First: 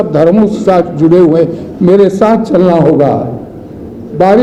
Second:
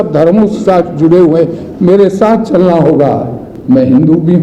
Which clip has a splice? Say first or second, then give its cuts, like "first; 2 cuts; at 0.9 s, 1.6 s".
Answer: second; 1 cut; at 3.5 s